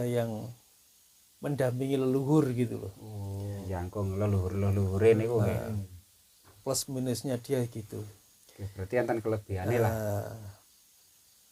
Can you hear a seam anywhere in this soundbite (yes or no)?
yes